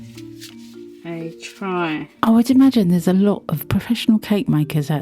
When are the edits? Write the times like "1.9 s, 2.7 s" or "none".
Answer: 1.0 s